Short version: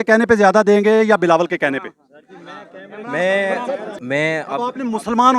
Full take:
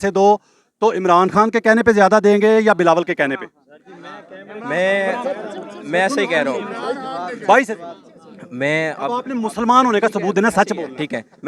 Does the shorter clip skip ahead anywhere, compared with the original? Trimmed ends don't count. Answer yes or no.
yes